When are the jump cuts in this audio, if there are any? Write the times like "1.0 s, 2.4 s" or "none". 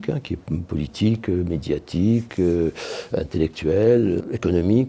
none